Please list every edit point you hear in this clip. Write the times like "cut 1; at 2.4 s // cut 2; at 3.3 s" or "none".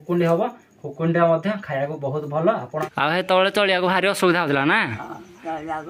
cut 1; at 2.7 s

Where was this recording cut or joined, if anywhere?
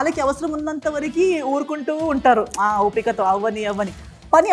none

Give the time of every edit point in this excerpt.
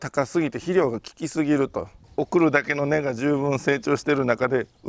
cut 1; at 2.1 s

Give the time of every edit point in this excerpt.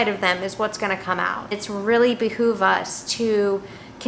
cut 1; at 1.5 s

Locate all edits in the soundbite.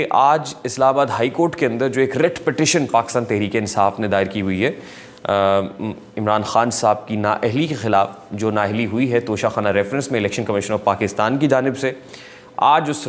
none

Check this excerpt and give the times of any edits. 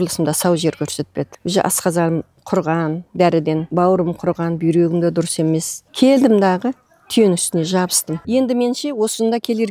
cut 1; at 1.4 s // cut 2; at 3.7 s // cut 3; at 5.8 s // cut 4; at 8.2 s

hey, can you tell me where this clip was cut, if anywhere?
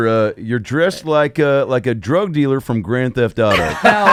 none

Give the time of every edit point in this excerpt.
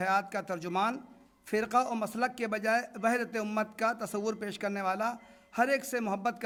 none

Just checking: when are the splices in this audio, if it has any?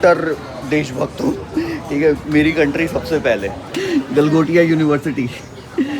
cut 1; at 3.6 s

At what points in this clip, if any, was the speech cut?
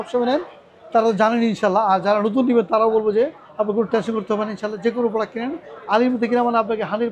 none

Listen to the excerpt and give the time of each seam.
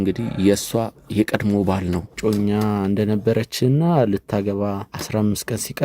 cut 1; at 2.1 s // cut 2; at 4.9 s

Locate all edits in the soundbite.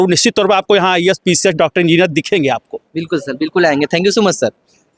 none

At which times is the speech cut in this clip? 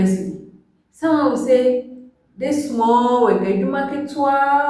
none

